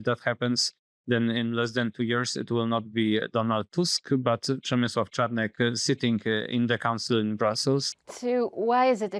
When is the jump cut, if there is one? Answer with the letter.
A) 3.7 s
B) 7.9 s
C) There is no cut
B